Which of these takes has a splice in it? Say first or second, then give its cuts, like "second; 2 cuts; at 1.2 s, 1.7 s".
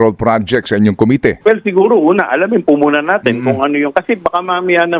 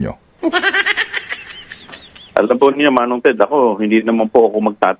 first; 1 cut; at 1.4 s